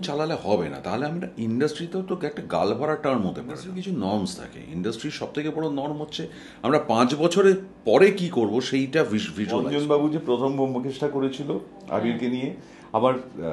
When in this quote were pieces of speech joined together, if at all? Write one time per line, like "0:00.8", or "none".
0:03.7
0:09.7